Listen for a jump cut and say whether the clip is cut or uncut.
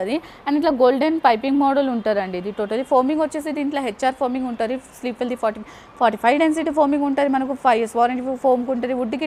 uncut